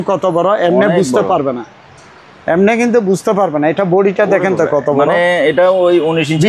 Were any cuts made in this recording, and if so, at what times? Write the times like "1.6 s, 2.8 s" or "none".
none